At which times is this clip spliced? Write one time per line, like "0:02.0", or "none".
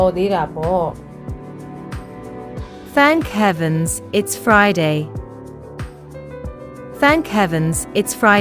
0:00.9
0:02.6